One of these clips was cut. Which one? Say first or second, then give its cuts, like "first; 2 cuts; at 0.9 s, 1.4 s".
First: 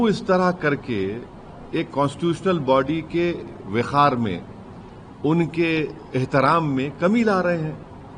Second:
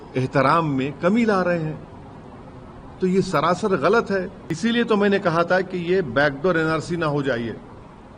second; 1 cut; at 4.4 s